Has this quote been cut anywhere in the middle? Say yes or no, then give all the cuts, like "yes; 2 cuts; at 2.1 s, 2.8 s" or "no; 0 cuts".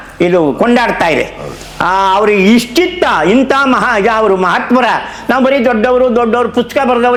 no; 0 cuts